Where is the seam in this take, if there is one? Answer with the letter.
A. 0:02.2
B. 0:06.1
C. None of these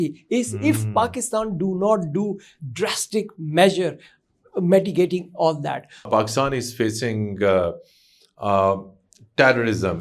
B